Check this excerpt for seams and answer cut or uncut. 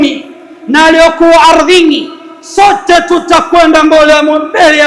uncut